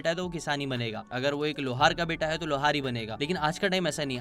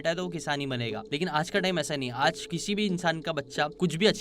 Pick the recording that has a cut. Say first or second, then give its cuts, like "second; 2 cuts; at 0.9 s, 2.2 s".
second; 1 cut; at 1.0 s